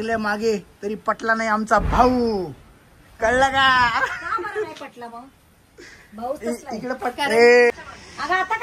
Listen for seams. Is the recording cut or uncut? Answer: uncut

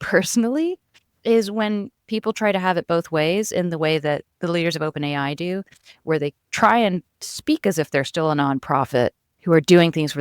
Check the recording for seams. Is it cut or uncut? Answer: cut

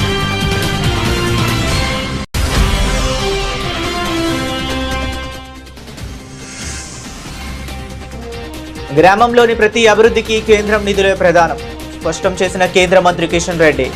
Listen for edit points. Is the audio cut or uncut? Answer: uncut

